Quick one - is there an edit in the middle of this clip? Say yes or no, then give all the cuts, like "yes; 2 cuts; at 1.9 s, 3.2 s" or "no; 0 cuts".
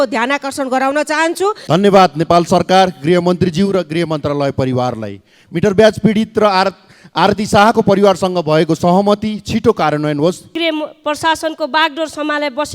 yes; 2 cuts; at 1.6 s, 10.5 s